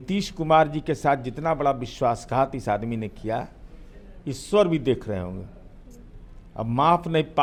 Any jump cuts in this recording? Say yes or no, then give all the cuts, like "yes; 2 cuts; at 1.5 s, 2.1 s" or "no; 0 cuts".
no; 0 cuts